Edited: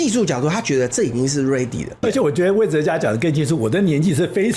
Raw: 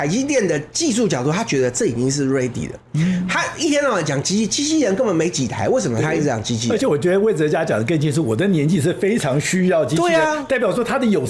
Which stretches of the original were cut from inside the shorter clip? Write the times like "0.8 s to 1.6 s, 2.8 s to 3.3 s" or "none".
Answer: 2.8 s to 6.6 s